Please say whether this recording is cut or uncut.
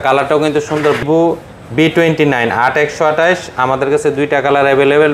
cut